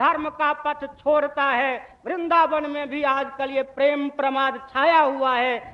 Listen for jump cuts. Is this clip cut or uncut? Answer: uncut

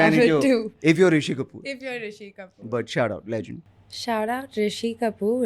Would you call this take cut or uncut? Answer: cut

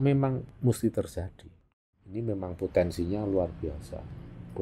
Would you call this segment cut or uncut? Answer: cut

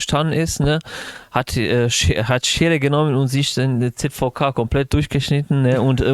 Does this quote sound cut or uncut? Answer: uncut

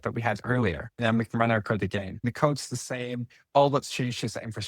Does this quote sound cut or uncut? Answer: cut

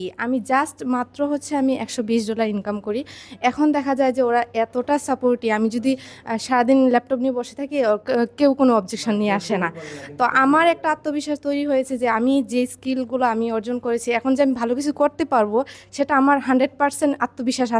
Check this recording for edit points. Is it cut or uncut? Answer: uncut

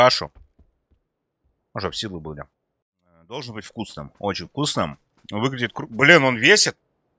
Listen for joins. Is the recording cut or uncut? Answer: cut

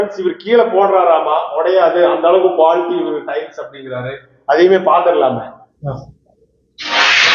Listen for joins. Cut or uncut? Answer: cut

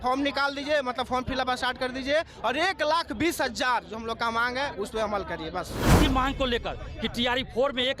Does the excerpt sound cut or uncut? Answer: cut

